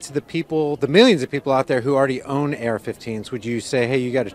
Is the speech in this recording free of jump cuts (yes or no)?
yes